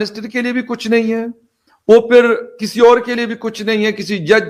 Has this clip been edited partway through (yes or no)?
no